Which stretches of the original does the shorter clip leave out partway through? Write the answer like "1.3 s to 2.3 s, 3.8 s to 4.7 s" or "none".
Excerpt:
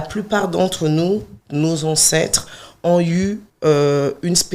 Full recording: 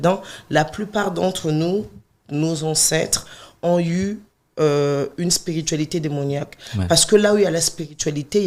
2.0 s to 2.2 s, 4.3 s to 4.4 s